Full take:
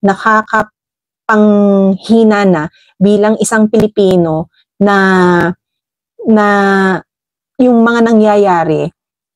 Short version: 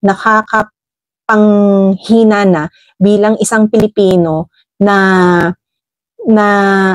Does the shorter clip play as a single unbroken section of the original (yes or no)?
yes